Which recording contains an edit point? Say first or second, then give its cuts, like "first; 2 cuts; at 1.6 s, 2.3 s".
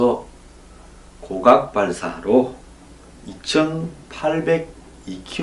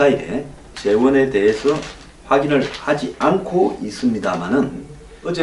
second; 1 cut; at 1.8 s